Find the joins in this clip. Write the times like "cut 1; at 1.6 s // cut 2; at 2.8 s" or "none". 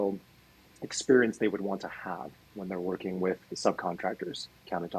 none